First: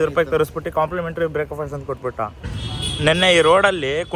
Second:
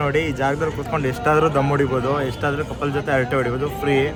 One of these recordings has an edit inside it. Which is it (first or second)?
first